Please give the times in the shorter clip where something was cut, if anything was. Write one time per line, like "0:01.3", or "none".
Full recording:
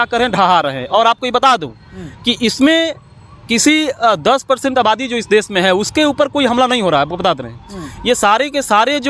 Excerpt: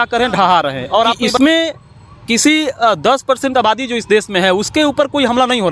0:01.3